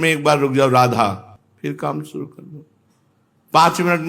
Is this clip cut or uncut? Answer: uncut